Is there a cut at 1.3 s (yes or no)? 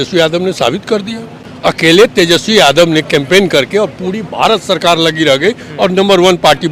yes